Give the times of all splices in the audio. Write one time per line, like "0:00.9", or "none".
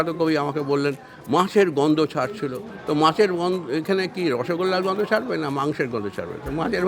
none